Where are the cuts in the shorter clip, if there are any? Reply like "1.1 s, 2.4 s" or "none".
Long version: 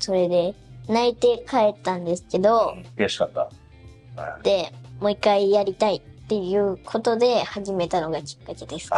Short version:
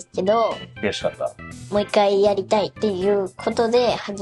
1.5 s, 2.7 s

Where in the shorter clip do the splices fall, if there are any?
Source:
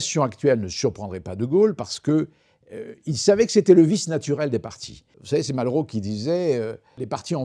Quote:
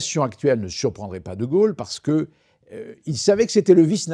none

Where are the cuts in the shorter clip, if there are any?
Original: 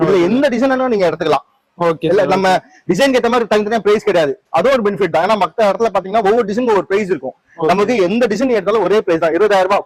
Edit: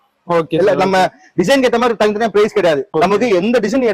2.9 s

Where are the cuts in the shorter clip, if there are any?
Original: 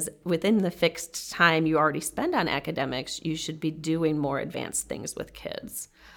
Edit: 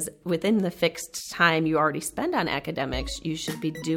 none

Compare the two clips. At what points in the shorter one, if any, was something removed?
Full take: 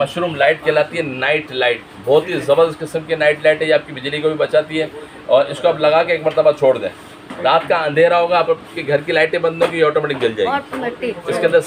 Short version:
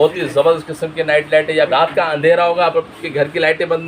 1.7 s

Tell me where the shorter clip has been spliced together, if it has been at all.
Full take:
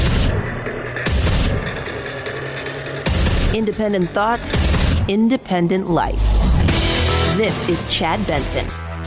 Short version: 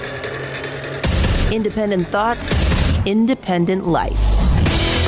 none

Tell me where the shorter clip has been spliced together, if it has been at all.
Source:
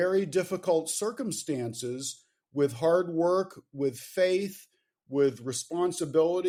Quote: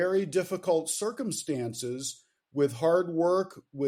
none

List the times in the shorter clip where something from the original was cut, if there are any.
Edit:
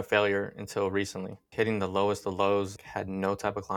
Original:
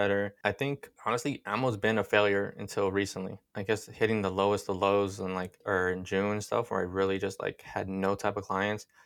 1.4 s, 2.8 s

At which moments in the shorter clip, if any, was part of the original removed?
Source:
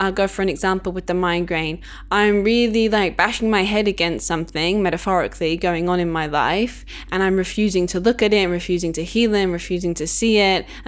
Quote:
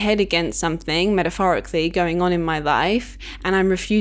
none

